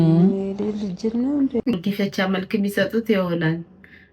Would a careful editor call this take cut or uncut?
cut